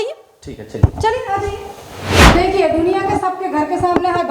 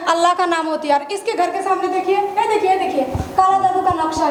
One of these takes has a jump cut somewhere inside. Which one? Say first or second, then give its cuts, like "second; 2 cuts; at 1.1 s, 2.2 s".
first; 1 cut; at 2.3 s